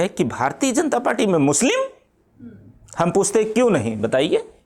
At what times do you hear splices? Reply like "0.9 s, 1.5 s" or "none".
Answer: none